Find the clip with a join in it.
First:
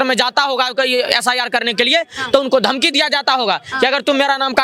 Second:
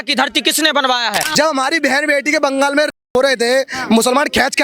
second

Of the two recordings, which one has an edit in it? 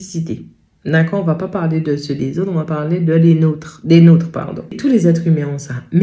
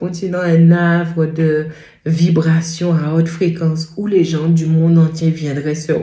first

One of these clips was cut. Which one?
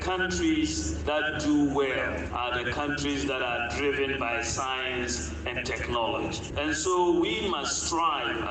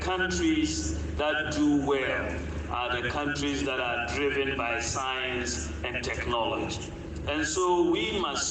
first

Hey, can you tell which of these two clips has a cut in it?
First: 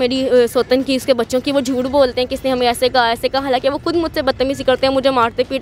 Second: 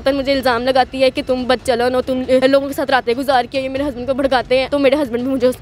second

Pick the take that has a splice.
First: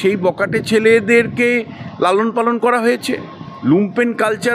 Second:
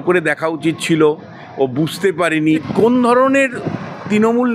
second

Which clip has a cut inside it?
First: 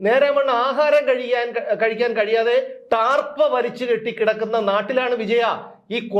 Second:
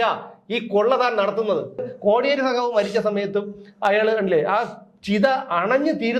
second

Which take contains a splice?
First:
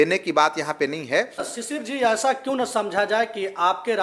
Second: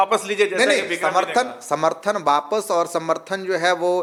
first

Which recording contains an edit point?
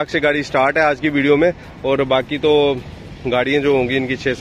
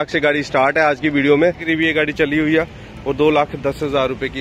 second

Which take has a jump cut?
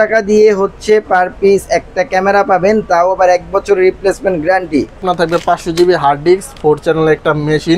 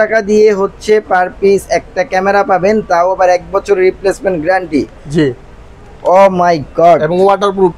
first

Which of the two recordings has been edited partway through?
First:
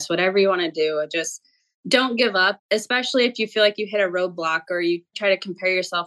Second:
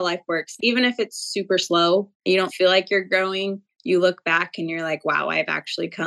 first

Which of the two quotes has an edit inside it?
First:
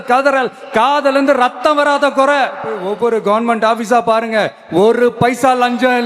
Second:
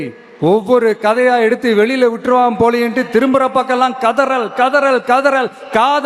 first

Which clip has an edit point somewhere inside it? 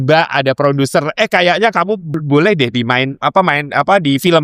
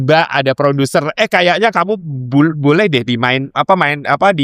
first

